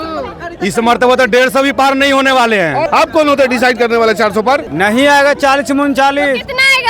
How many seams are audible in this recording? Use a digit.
2